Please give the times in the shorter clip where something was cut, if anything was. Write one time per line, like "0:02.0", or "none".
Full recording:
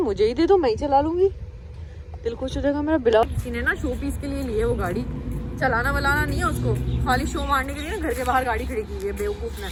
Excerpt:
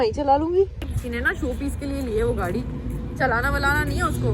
0:01.0